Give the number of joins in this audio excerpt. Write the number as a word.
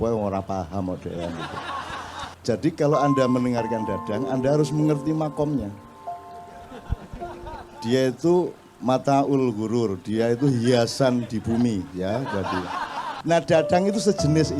two